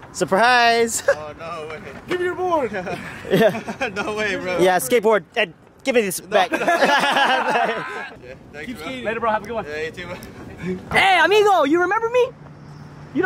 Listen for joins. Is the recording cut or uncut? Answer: uncut